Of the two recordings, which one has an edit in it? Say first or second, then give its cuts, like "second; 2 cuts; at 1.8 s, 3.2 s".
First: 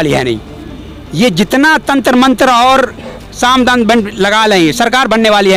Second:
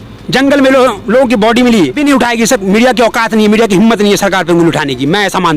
second; 1 cut; at 2.0 s